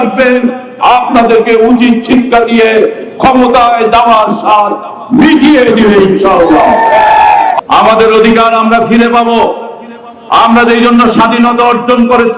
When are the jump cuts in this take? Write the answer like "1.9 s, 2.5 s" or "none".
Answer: 7.6 s